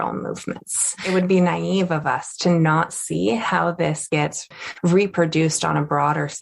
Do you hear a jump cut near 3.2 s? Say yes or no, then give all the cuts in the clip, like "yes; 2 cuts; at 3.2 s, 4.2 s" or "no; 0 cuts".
no; 1 cut; at 1.0 s